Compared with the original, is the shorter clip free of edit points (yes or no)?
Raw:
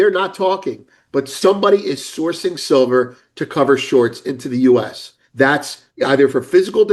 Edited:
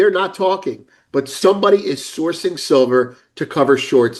yes